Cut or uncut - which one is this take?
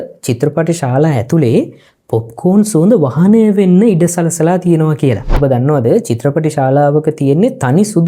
cut